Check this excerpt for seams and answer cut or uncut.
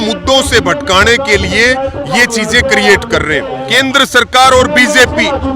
cut